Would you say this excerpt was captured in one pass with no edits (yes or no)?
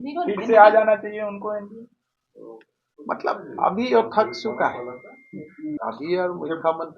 no